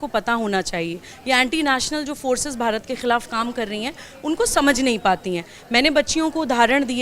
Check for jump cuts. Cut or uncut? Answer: cut